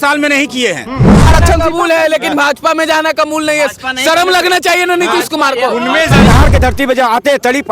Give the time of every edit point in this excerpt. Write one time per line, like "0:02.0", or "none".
0:01.3
0:06.3